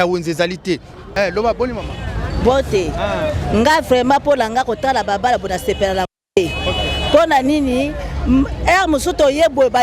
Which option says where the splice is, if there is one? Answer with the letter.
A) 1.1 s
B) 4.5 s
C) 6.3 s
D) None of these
A